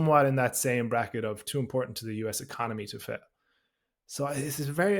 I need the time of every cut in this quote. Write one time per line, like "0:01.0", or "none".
0:01.4